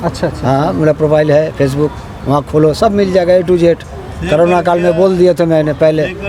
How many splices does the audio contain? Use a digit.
0